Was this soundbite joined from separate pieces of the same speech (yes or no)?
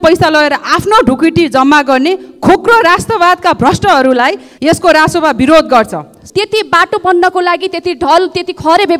yes